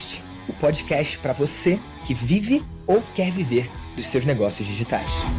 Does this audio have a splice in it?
no; 0 cuts

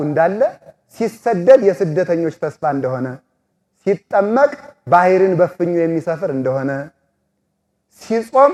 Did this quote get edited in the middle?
no; 0 cuts

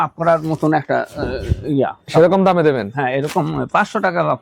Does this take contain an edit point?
no; 0 cuts

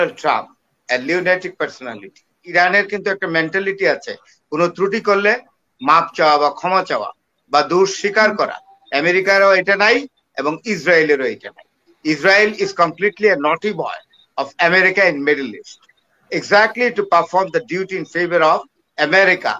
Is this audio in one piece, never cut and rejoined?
no; 1 cut; at 2.5 s

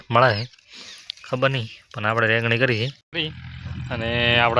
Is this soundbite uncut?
no; 1 cut; at 3.0 s

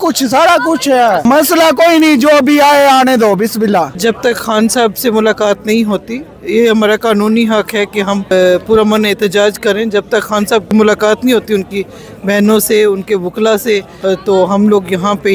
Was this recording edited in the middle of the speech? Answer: yes; 5 cuts; at 1.2 s, 3.9 s, 8.3 s, 10.7 s, 13.9 s

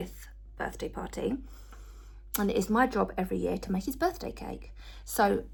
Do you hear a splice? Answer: no; 0 cuts

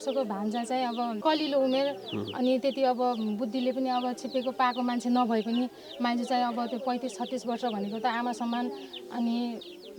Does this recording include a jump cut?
yes; 1 cut; at 1.2 s

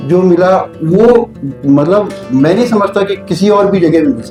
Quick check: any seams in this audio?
no; 0 cuts

